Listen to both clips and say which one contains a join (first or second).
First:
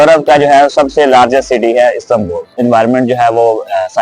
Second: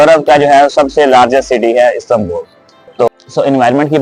first